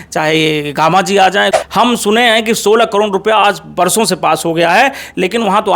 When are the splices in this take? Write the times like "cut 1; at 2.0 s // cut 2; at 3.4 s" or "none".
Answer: cut 1; at 1.6 s